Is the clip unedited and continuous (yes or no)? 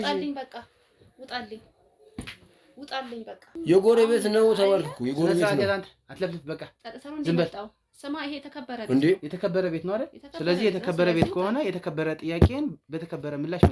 no